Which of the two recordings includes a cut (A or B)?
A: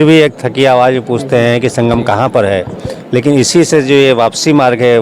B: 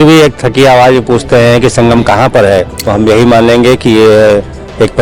B